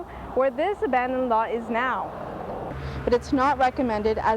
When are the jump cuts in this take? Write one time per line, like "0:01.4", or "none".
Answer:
0:02.7